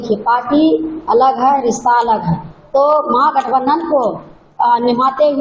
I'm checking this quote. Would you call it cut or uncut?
uncut